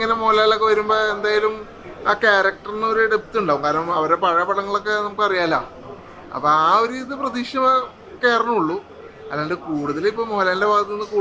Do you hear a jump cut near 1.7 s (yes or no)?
no